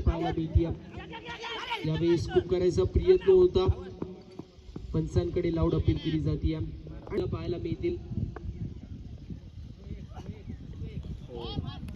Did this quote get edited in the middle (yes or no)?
yes